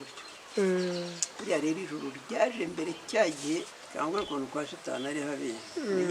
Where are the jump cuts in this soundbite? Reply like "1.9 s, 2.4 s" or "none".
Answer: 3.8 s